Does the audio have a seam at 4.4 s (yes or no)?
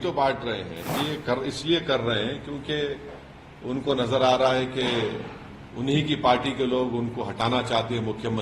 no